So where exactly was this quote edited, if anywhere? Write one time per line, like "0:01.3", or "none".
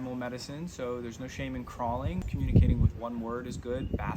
0:02.3